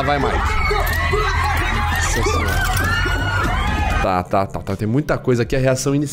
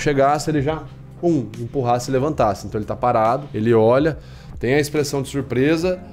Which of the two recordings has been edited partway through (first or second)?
second